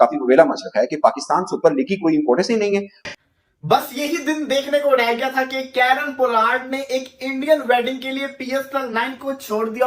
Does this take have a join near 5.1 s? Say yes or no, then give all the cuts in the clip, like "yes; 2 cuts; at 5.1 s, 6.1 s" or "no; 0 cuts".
no; 1 cut; at 3.1 s